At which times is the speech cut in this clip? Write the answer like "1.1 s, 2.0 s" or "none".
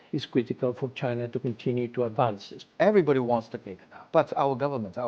2.5 s, 4.0 s